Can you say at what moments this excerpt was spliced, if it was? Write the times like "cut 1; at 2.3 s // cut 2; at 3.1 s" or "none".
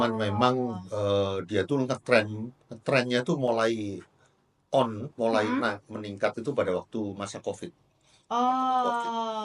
none